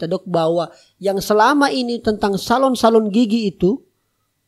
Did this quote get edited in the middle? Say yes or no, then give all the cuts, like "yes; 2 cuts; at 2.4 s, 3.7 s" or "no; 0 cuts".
no; 0 cuts